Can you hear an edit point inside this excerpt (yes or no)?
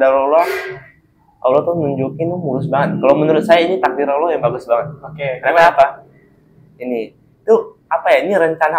no